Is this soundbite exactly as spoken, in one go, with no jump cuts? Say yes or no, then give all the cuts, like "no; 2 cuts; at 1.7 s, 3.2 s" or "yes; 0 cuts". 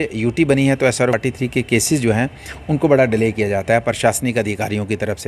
no; 1 cut; at 1.1 s